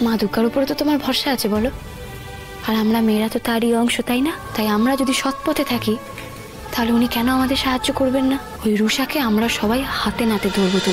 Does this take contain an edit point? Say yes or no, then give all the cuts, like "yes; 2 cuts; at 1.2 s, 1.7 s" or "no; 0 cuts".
yes; 2 cuts; at 4.4 s, 8.5 s